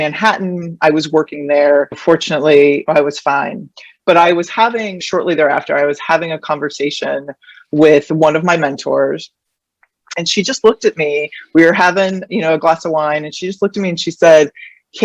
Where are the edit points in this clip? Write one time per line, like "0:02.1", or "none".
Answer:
0:05.0
0:10.1